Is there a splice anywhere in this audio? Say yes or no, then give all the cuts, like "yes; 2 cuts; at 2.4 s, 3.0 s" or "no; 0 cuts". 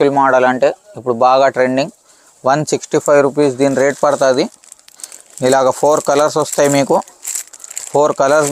no; 0 cuts